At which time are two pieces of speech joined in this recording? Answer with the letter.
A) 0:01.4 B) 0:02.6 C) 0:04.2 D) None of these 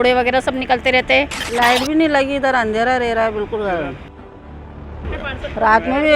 A